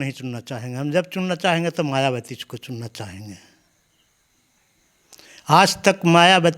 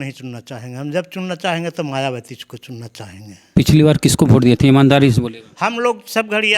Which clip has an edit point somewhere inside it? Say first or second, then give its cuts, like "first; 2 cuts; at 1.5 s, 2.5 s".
second; 1 cut; at 3.3 s